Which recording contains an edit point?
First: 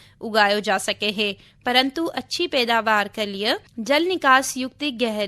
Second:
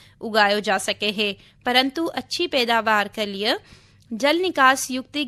first; 1 cut; at 3.7 s

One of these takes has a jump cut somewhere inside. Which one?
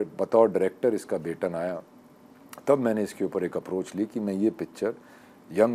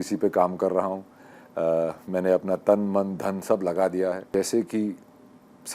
second; 1 cut; at 4.3 s

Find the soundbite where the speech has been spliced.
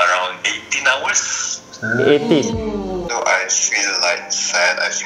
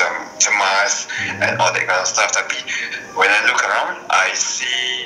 first; 1 cut; at 3.1 s

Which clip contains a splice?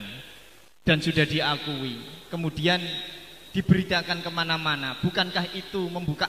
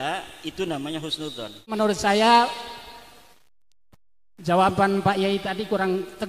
second; 1 cut; at 1.7 s

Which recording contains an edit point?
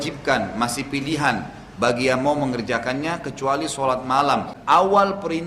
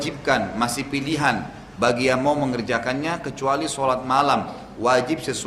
first; 1 cut; at 4.5 s

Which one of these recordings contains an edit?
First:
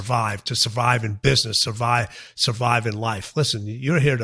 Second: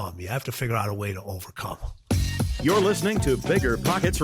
second; 1 cut; at 1.9 s

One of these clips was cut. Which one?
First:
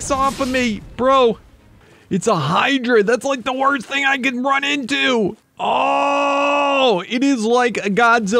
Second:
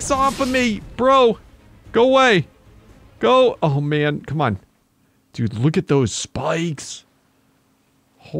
first; 2 cuts; at 1.8 s, 5.5 s

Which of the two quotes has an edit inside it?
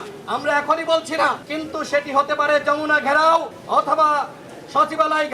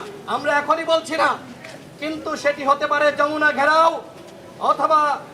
first; 2 cuts; at 1.5 s, 3.6 s

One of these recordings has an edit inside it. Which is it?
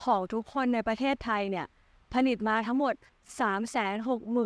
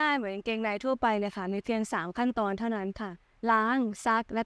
second; 1 cut; at 3.2 s

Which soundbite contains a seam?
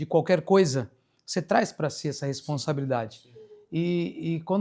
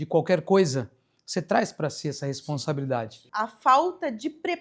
second; 1 cut; at 3.2 s

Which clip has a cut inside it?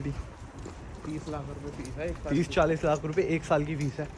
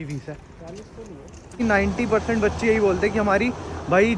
second; 1 cut; at 1.5 s

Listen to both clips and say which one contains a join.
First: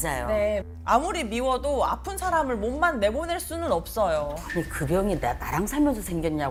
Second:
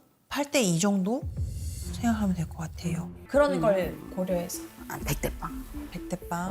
second; 1 cut; at 3.1 s

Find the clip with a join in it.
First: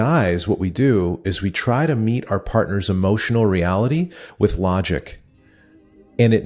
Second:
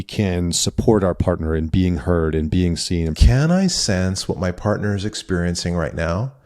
second; 1 cut; at 3.2 s

